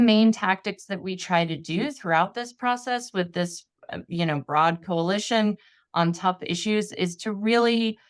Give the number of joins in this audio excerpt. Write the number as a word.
zero